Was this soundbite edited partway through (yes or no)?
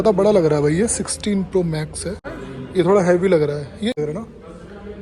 yes